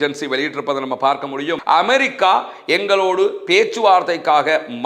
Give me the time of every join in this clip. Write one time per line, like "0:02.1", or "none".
0:01.6